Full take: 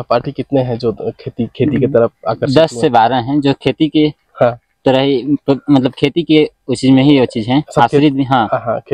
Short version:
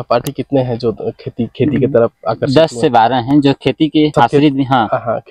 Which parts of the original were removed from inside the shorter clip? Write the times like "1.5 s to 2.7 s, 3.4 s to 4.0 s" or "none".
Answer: 4.1 s to 7.7 s